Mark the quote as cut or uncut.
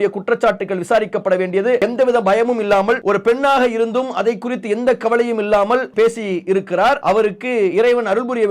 cut